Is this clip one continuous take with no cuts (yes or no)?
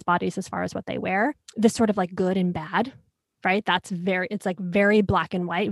no